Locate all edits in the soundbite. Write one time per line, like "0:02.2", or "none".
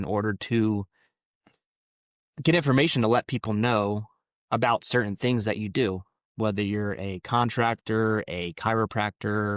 none